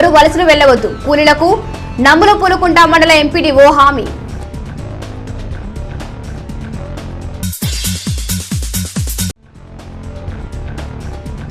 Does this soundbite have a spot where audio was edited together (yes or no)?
yes